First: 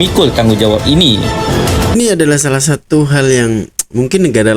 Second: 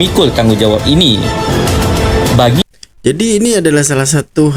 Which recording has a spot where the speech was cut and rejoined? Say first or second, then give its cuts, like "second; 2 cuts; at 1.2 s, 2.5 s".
first; 1 cut; at 1.9 s